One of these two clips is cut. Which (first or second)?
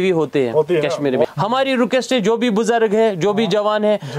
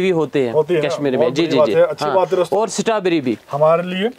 first